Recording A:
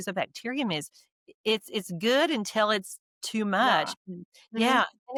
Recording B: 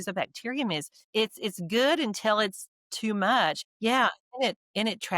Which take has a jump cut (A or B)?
B